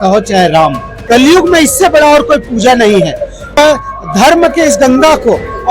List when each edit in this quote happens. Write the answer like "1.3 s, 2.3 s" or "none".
0.9 s, 3.6 s